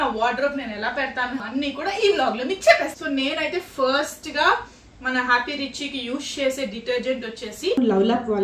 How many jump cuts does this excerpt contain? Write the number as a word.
two